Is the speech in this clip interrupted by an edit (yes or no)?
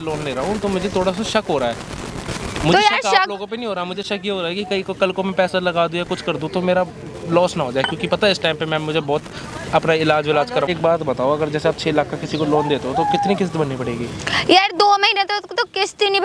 no